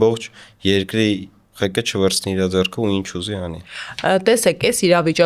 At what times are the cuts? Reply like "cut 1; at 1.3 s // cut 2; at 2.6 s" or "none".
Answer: none